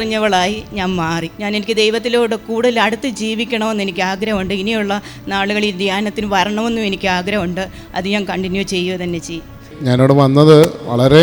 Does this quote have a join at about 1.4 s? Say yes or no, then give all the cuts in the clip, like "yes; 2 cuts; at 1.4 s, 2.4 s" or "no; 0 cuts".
no; 0 cuts